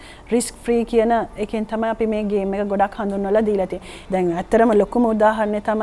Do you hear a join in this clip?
yes; 1 cut; at 3.9 s

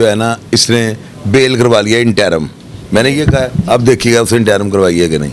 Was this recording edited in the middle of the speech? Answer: no; 0 cuts

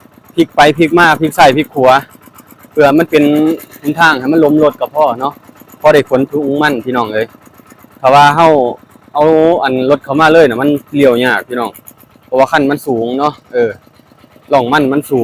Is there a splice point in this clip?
no; 0 cuts

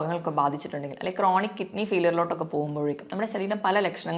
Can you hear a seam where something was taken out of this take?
no; 0 cuts

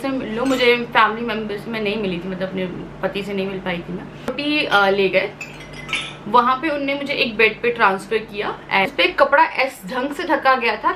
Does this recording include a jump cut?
yes; 2 cuts; at 4.1 s, 8.9 s

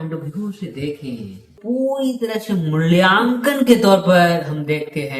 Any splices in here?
yes; 1 cut; at 1.5 s

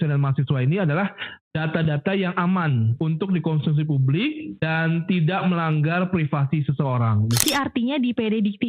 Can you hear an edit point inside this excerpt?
yes; 3 cuts; at 2.9 s, 4.5 s, 7.4 s

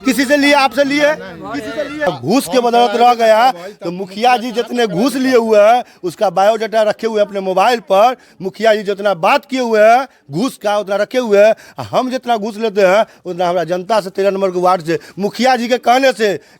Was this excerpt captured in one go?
no; 1 cut; at 2.1 s

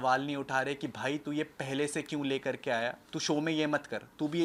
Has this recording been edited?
no; 0 cuts

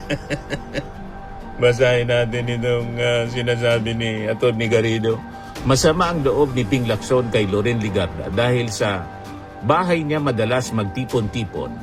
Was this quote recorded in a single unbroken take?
yes; 0 cuts

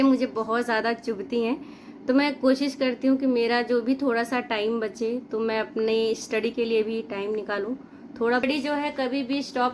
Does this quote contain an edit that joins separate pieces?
yes; 1 cut; at 8.4 s

